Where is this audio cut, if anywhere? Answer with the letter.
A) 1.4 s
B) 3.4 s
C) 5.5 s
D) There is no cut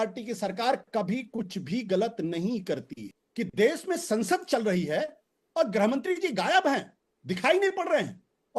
B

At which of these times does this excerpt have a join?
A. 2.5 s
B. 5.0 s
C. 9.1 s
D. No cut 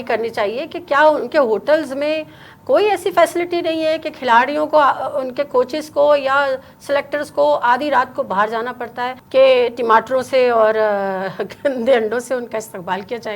C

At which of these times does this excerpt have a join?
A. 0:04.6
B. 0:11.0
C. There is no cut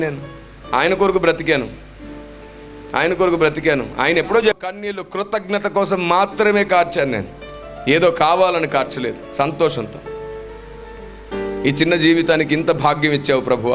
A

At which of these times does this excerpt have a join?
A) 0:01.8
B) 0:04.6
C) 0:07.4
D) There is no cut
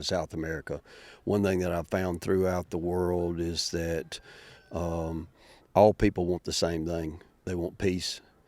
C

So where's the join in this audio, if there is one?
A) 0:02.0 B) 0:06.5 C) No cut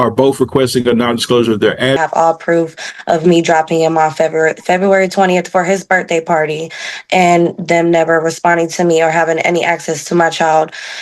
A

